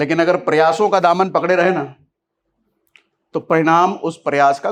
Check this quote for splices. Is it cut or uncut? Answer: uncut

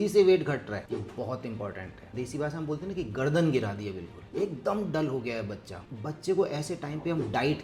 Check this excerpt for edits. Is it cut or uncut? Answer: cut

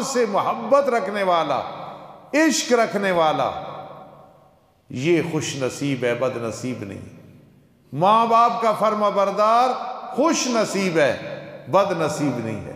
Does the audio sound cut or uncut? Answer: uncut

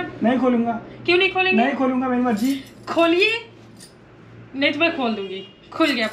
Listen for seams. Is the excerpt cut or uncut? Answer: uncut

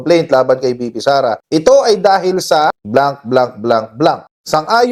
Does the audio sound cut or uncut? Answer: uncut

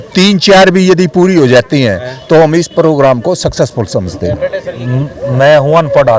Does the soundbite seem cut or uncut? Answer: cut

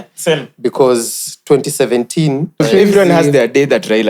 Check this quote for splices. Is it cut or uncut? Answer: cut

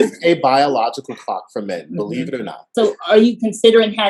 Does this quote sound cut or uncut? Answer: cut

